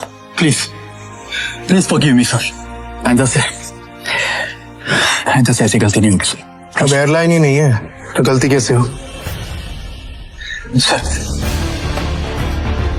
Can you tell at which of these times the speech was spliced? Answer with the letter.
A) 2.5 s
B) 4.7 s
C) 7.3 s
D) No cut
D